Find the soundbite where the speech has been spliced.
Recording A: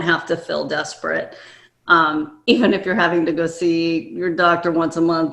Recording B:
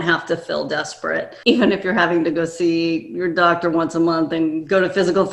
B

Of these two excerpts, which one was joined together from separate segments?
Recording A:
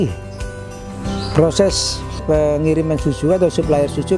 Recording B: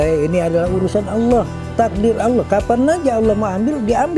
A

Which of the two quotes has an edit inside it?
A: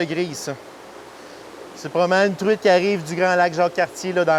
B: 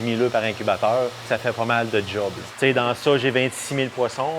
B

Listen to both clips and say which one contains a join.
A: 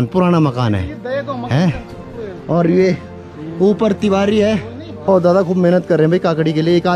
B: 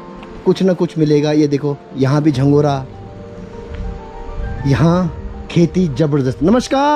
A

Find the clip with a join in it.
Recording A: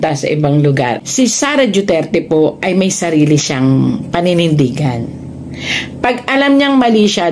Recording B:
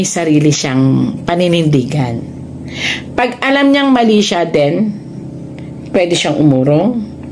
A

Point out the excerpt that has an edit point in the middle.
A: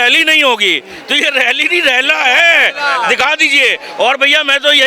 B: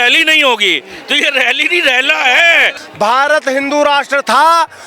B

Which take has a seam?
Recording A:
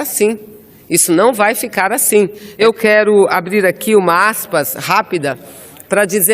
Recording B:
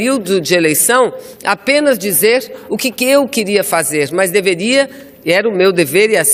A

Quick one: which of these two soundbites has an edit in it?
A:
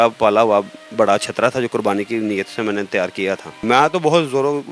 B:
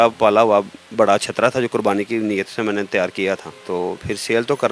A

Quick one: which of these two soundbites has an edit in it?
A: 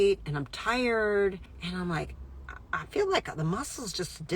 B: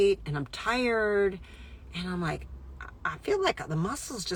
A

